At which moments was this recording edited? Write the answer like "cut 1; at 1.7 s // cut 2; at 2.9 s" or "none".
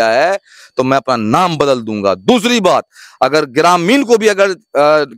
none